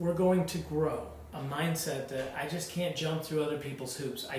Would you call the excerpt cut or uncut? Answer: cut